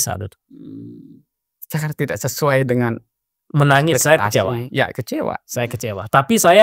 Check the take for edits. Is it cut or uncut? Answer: uncut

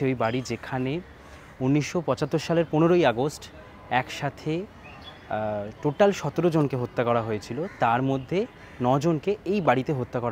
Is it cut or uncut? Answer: uncut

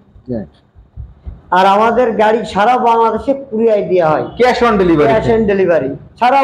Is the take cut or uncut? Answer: uncut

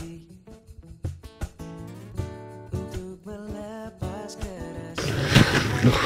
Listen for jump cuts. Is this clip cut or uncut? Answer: uncut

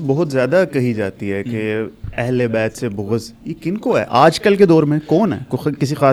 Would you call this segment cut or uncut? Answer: uncut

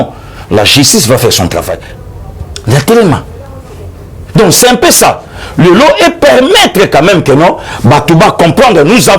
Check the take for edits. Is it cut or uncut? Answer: cut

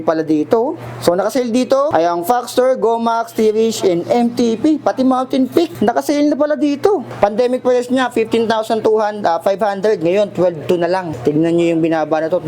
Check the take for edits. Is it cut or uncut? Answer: cut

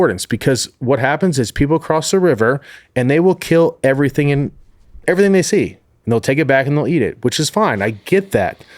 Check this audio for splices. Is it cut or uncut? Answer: cut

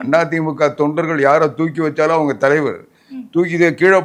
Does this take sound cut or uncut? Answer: uncut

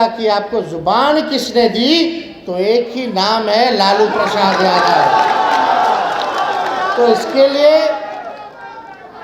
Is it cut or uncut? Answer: uncut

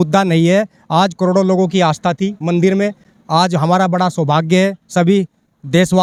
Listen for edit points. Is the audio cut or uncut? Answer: uncut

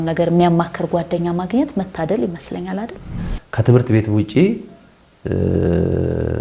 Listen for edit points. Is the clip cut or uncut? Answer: cut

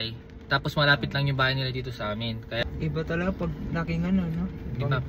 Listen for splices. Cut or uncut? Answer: cut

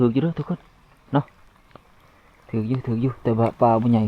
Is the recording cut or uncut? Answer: uncut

